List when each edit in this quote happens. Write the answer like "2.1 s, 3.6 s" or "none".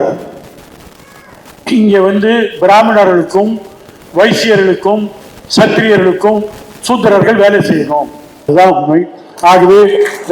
8.5 s

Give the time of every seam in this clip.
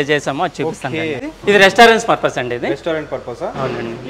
1.3 s

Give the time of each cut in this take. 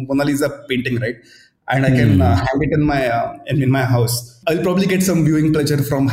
4.3 s

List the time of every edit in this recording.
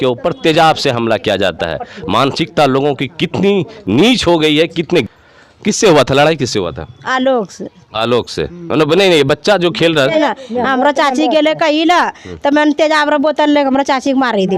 5.1 s, 10.2 s

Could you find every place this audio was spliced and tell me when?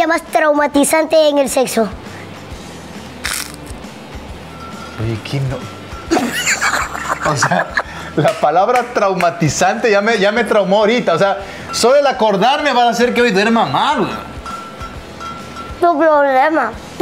none

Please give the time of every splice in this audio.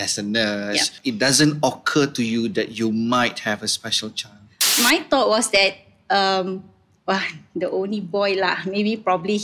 1.0 s, 4.6 s

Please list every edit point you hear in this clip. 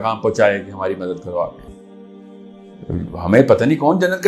1.7 s

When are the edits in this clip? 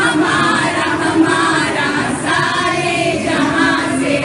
none

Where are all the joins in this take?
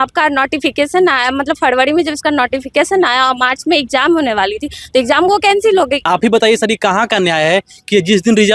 6.1 s

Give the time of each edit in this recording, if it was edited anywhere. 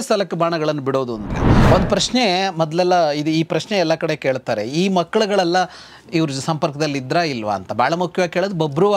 1.4 s

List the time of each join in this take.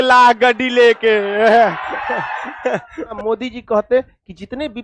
1.3 s, 3.1 s

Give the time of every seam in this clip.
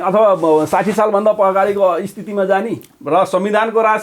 2.9 s

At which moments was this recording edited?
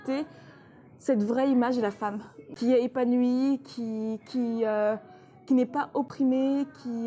2.5 s, 6.1 s

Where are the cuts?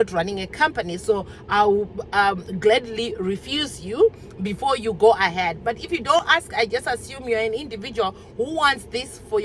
none

